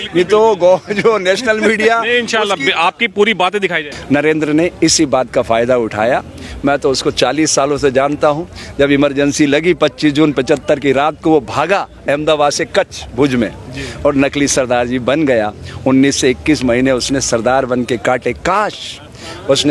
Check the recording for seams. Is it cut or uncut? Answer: cut